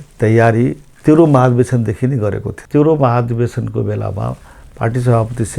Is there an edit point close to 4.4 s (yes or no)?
no